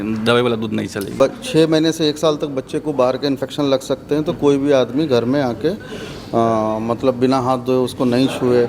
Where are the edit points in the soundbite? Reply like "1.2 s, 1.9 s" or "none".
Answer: 1.0 s